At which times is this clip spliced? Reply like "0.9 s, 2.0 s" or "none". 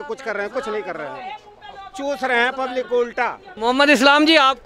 3.5 s

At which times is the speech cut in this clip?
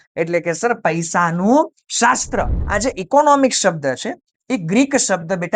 2.6 s

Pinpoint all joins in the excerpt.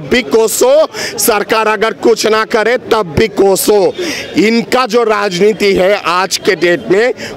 none

